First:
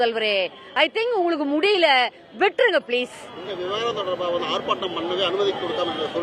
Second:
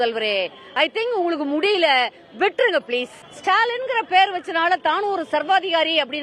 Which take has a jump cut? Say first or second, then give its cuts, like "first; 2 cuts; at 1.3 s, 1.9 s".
second; 1 cut; at 3.3 s